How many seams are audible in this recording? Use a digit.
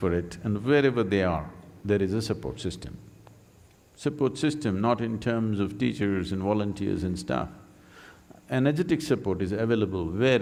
0